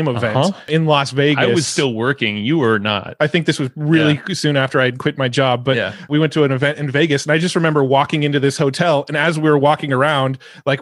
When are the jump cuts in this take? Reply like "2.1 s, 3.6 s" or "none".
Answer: 6.1 s